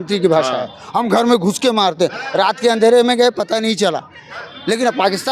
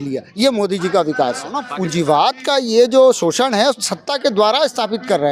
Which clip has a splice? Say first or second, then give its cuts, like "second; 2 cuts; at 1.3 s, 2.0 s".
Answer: second; 1 cut; at 1.6 s